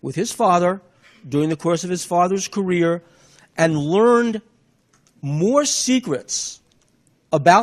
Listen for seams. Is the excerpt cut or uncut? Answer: cut